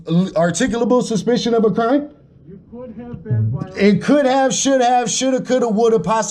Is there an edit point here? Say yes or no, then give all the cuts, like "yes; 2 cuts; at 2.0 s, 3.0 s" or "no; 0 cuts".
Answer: no; 0 cuts